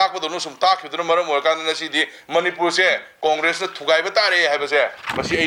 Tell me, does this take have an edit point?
no; 0 cuts

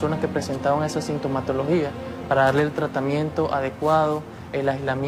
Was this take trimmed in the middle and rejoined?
no; 0 cuts

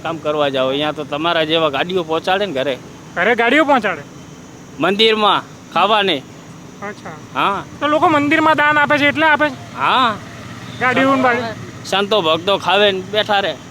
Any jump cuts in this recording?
no; 0 cuts

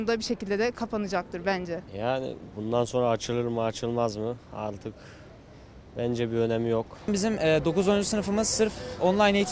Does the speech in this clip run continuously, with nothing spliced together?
no; 2 cuts; at 1.9 s, 7.1 s

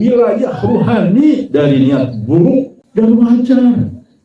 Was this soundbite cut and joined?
yes; 1 cut; at 2.8 s

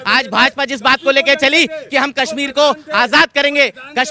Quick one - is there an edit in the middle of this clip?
no; 0 cuts

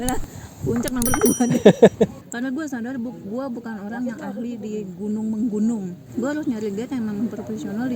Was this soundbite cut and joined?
yes; 2 cuts; at 2.2 s, 6.0 s

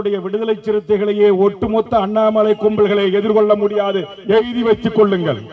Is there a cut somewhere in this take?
no; 0 cuts

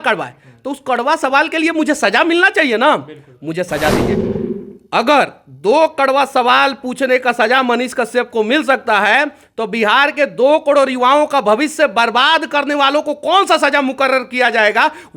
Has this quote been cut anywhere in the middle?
no; 0 cuts

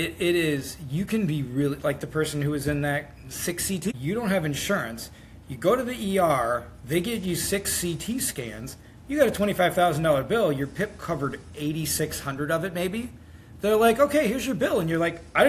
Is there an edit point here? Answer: yes; 1 cut; at 3.9 s

